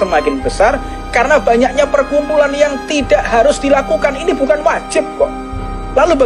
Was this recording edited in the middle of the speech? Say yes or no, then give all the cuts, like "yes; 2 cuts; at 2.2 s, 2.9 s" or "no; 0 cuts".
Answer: no; 0 cuts